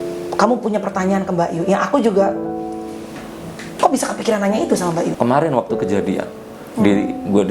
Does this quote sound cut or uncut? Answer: cut